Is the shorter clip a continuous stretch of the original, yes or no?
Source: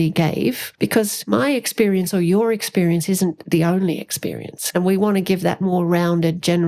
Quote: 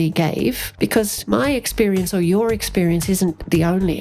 yes